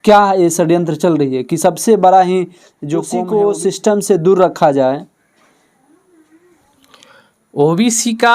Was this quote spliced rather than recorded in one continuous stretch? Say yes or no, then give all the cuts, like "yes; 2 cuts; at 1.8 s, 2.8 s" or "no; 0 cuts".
yes; 1 cut; at 3.1 s